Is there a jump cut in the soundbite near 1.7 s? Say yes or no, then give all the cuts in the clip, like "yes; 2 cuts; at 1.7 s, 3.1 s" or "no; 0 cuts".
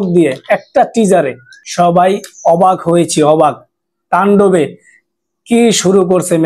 yes; 1 cut; at 1.7 s